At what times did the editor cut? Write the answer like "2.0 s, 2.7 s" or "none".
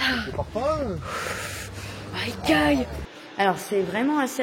3.0 s

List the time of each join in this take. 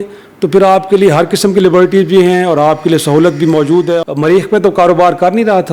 4.0 s

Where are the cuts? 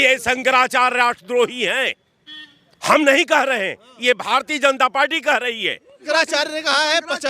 6.0 s

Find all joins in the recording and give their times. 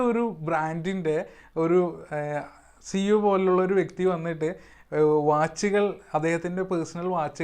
none

